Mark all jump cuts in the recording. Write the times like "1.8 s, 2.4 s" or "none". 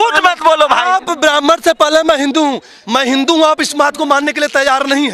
2.7 s